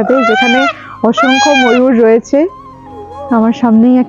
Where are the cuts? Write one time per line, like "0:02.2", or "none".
none